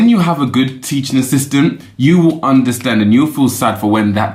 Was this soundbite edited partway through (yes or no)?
no